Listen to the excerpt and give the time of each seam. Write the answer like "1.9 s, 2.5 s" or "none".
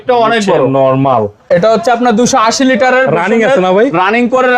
1.4 s